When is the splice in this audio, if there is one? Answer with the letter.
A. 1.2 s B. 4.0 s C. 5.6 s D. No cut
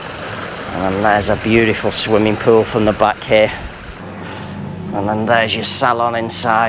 B